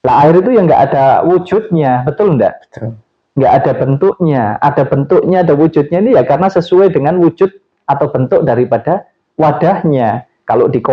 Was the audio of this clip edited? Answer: no; 0 cuts

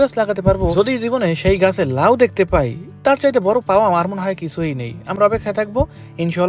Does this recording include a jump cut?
no; 0 cuts

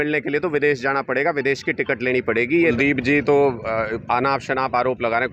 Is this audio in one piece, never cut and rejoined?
no; 1 cut; at 2.7 s

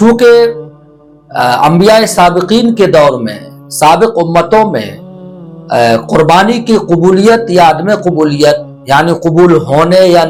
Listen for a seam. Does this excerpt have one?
no; 0 cuts

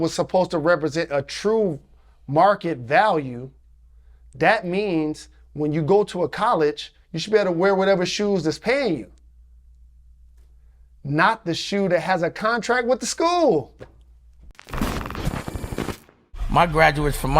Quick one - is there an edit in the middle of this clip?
yes; 1 cut; at 14.7 s

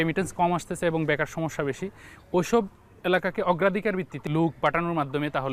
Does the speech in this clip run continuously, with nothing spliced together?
no; 1 cut; at 4.1 s

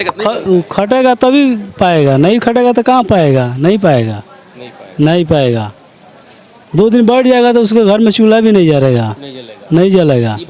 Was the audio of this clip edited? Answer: no; 0 cuts

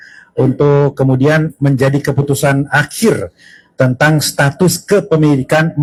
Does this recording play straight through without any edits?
yes; 0 cuts

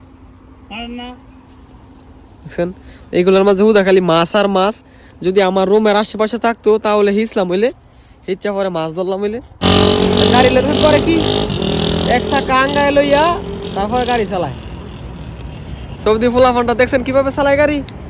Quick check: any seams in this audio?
yes; 1 cut; at 9.5 s

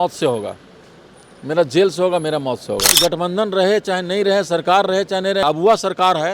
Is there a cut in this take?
yes; 2 cuts; at 2.9 s, 5.4 s

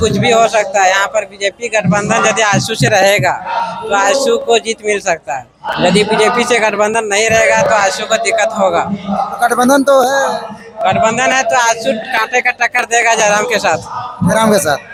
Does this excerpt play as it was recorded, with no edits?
yes; 0 cuts

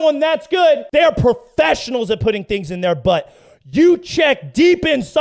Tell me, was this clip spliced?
no; 0 cuts

